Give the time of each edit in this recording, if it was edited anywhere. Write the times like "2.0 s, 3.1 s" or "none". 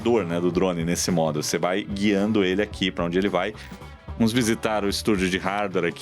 3.7 s